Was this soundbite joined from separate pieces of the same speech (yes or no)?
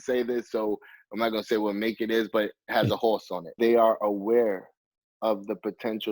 yes